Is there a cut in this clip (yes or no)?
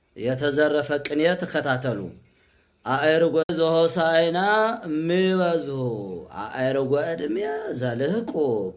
yes